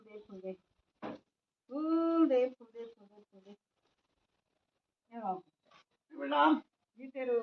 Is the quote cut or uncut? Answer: uncut